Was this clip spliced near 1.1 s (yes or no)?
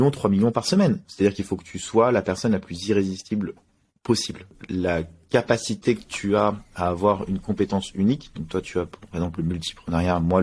yes